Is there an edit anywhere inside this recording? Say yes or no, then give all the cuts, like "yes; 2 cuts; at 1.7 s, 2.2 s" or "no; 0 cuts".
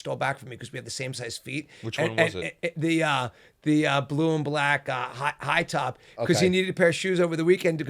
no; 0 cuts